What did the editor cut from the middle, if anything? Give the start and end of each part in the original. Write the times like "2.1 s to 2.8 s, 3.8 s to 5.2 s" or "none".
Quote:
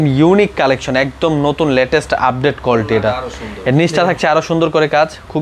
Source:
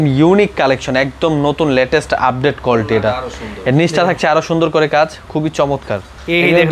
none

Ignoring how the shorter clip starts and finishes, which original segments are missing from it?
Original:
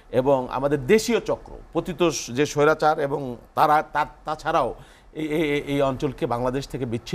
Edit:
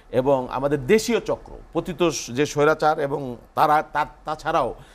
none

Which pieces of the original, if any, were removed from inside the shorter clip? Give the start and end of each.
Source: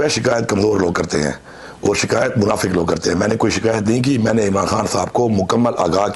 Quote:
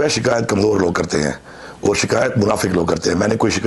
none

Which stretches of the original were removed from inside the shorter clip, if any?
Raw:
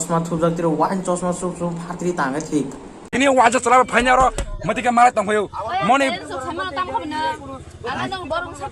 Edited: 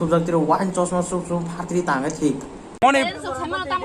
3.1 s to 5.8 s

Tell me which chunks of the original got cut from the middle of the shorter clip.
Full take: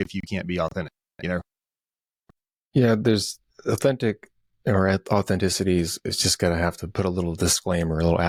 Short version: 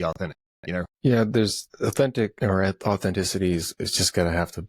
1.5 s to 2.6 s, 3.4 s to 3.5 s, 4.2 s to 4.6 s

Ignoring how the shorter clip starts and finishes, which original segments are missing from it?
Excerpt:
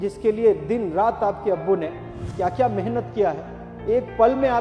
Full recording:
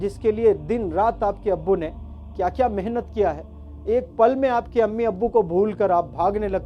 none

